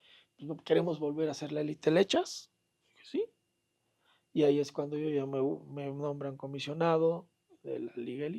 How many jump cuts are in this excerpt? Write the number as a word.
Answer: zero